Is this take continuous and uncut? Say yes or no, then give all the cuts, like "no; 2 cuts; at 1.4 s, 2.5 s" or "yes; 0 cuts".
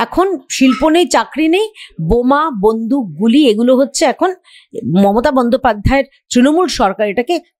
yes; 0 cuts